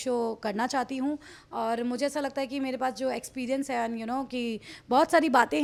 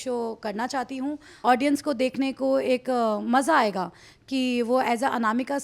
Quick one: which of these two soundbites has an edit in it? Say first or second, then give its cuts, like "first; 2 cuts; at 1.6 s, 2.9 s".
second; 1 cut; at 1.3 s